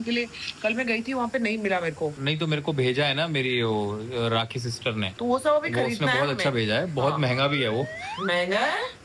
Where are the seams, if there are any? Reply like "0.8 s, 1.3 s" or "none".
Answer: 2.2 s, 7.9 s

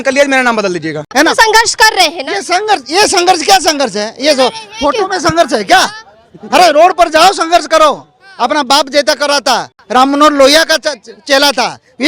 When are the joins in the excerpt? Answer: 1.0 s, 9.7 s

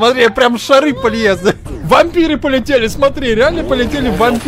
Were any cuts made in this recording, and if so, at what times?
1.7 s

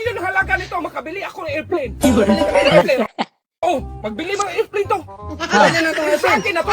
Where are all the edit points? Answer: 3.4 s

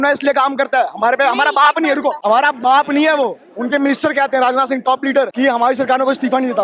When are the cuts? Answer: 2.2 s, 3.5 s, 5.3 s

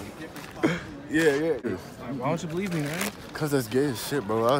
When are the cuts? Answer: 1.7 s

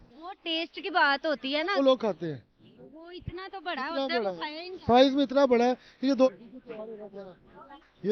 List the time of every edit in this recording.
1.8 s, 6.3 s

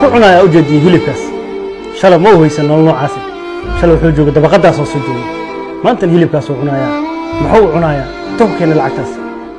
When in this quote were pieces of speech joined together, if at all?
none

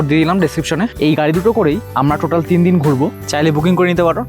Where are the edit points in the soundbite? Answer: 0.9 s, 1.9 s, 3.2 s

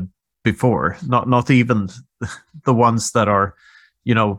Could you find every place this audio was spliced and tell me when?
none

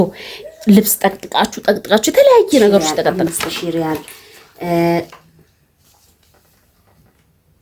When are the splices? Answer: 3.2 s

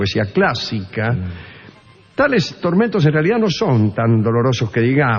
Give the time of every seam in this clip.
3.0 s

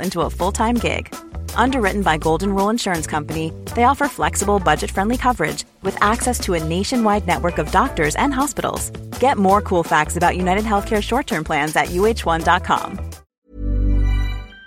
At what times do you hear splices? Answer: 13.3 s

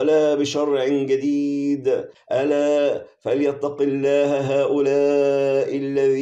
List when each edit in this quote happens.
2.1 s

